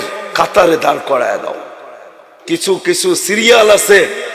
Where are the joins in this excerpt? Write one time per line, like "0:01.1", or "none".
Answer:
0:02.4